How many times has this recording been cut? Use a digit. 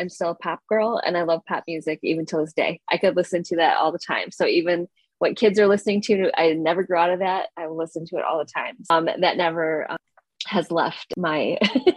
3